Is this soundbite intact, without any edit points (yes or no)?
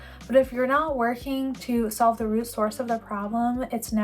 yes